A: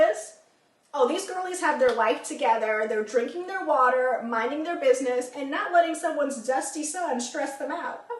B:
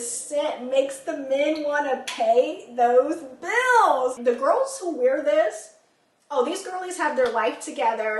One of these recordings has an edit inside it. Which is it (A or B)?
B